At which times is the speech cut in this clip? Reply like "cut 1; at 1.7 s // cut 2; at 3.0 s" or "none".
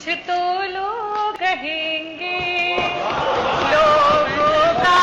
cut 1; at 1.4 s